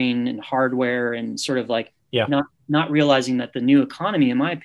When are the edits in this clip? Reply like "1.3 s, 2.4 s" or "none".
none